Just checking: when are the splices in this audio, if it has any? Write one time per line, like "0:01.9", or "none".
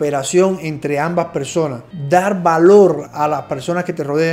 0:01.9